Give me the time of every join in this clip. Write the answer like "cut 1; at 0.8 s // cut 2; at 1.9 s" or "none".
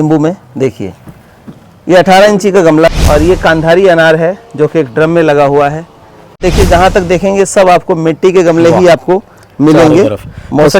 cut 1; at 2.9 s // cut 2; at 6.5 s